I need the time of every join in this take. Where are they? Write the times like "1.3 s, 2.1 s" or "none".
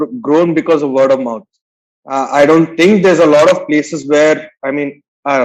none